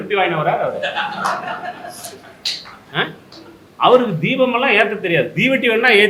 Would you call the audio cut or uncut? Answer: uncut